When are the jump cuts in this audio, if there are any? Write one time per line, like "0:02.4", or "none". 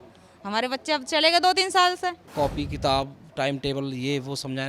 0:02.2